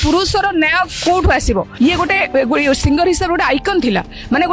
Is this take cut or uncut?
cut